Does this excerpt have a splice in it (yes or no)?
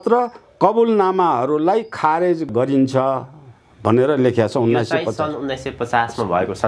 yes